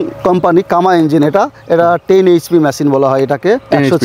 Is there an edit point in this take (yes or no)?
no